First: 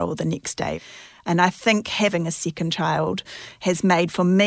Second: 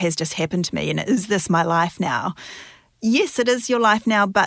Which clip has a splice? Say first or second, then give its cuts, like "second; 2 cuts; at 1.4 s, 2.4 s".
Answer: first; 2 cuts; at 0.8 s, 2.1 s